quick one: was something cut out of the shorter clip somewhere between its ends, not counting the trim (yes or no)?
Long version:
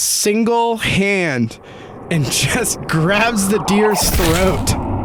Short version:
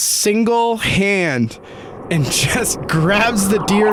no